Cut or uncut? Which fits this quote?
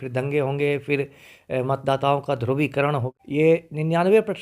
cut